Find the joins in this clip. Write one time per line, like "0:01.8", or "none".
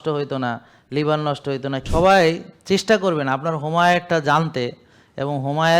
0:01.8